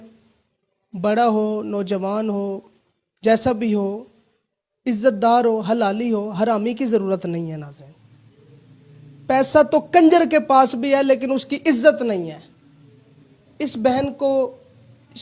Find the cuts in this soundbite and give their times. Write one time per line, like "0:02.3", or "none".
none